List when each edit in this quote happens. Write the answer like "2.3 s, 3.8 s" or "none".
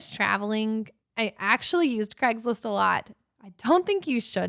none